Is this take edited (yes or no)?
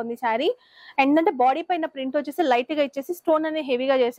no